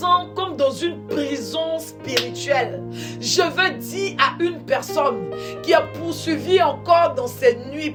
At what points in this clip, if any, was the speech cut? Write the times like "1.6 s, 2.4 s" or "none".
none